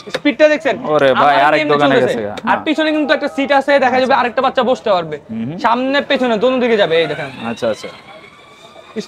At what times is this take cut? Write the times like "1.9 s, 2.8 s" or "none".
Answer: none